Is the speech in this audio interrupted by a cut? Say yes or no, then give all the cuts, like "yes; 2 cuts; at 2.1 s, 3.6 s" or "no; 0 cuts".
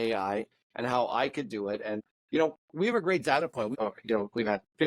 yes; 2 cuts; at 2.1 s, 3.7 s